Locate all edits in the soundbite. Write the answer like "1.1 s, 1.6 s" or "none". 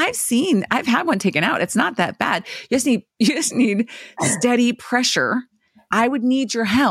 5.8 s